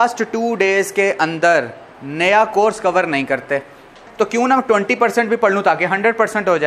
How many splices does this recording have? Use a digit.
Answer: 1